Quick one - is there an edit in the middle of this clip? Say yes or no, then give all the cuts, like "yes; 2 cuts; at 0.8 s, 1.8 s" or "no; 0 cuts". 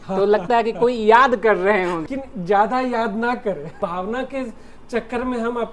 yes; 2 cuts; at 2.0 s, 3.8 s